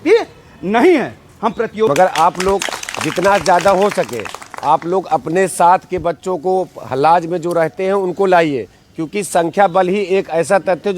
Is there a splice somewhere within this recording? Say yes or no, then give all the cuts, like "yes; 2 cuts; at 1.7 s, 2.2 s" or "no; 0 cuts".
yes; 1 cut; at 1.9 s